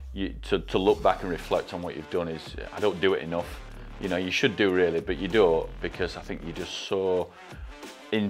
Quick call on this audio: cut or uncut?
uncut